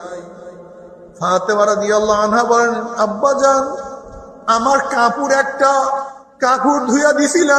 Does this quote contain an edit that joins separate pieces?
yes; 1 cut; at 6.2 s

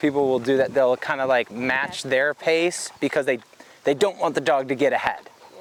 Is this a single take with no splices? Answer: yes; 0 cuts

